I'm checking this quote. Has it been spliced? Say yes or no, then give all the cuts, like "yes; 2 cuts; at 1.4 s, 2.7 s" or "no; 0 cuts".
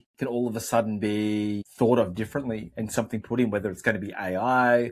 yes; 1 cut; at 1.6 s